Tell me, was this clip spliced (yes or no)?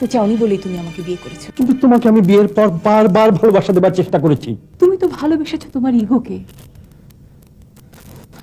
yes